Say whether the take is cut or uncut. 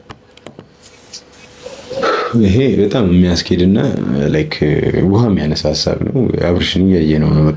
uncut